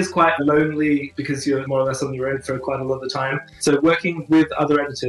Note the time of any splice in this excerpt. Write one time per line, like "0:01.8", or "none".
0:01.4
0:03.5